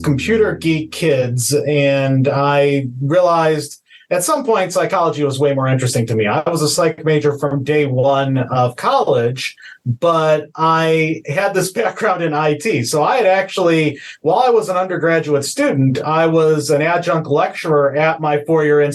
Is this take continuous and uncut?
yes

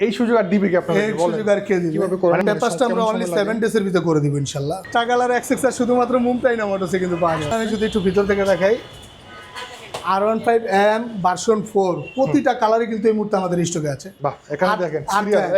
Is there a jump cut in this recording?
yes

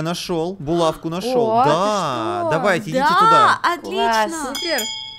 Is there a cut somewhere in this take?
no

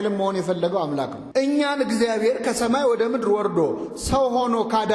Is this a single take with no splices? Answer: no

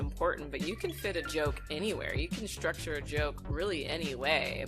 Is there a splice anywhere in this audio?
no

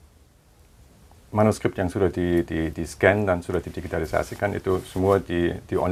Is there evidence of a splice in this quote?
no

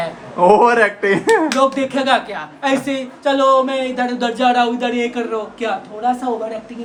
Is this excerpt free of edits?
yes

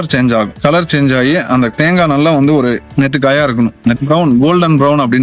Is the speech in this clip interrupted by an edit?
yes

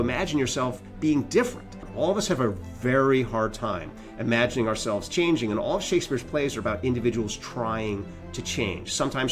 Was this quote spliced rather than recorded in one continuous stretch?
yes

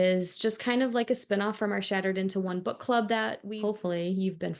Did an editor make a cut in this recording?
yes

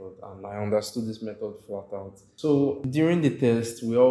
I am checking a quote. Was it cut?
yes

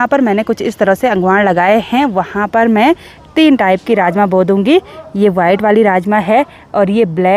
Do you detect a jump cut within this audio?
no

